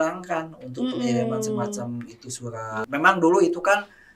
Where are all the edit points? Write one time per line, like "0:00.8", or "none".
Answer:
0:02.7